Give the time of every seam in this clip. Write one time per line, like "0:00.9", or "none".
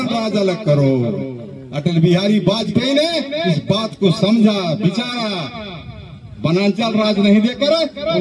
none

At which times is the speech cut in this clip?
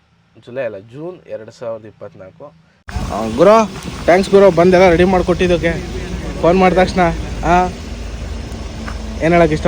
0:03.0

